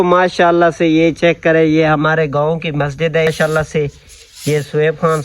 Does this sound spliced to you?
yes; 1 cut; at 3.3 s

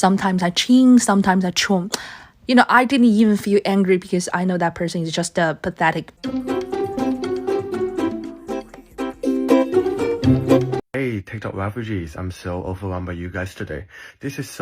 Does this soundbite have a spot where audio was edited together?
yes; 2 cuts; at 6.1 s, 10.8 s

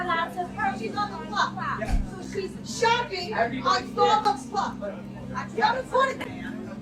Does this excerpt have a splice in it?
no; 0 cuts

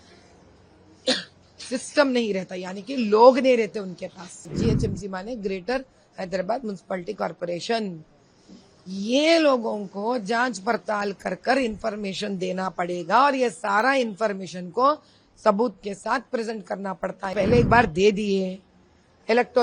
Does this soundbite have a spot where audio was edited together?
yes; 2 cuts; at 4.5 s, 17.3 s

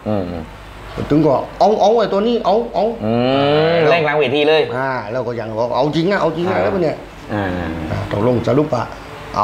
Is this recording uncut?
yes; 0 cuts

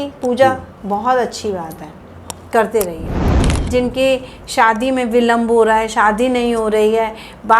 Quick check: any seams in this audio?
yes; 1 cut; at 3.4 s

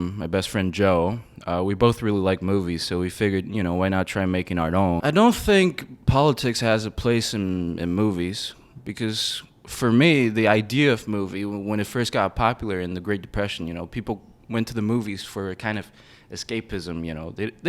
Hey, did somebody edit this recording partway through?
yes; 1 cut; at 5.0 s

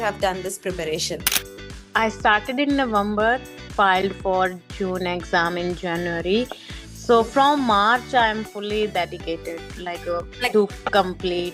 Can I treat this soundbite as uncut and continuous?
no; 1 cut; at 3.6 s

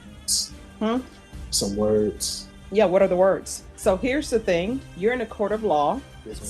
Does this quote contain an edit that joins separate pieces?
yes; 2 cuts; at 3.6 s, 4.9 s

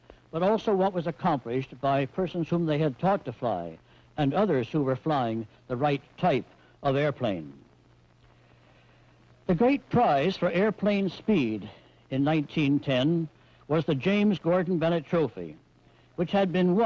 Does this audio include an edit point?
no; 0 cuts

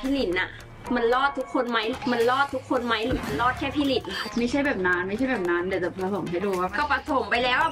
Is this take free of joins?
no; 1 cut; at 4.2 s

